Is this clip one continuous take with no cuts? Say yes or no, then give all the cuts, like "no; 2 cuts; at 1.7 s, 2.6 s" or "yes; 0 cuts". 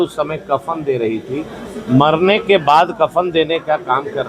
yes; 0 cuts